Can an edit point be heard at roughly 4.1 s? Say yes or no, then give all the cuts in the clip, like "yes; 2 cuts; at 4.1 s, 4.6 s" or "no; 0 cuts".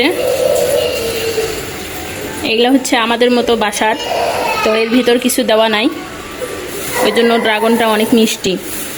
no; 0 cuts